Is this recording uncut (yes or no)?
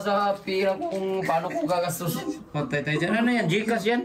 yes